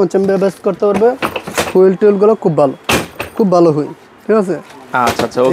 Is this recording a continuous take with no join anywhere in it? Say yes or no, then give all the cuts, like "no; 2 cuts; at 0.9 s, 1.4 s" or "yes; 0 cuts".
yes; 0 cuts